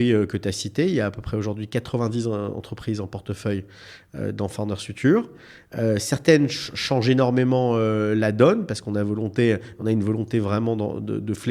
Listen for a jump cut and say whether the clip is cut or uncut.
uncut